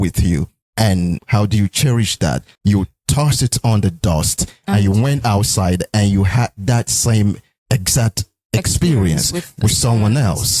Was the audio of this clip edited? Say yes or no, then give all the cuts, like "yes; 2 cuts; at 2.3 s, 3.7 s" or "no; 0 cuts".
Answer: yes; 2 cuts; at 1.2 s, 2.5 s